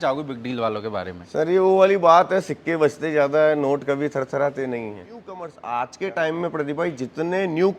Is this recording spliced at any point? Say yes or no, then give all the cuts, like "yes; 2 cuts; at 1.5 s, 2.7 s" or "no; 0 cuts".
yes; 1 cut; at 5.5 s